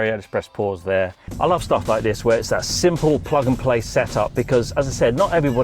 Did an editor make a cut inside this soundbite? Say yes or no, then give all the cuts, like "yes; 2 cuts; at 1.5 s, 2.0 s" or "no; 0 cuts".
yes; 1 cut; at 1.2 s